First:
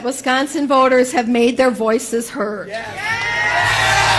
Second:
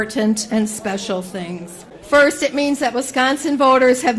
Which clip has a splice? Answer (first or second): second